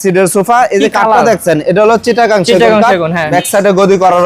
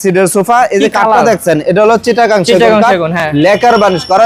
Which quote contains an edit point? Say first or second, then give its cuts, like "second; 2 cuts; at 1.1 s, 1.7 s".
first; 1 cut; at 3.2 s